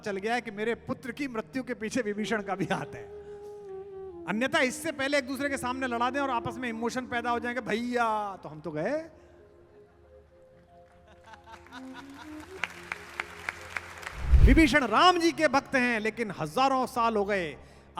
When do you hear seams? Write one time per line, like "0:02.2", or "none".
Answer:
0:14.3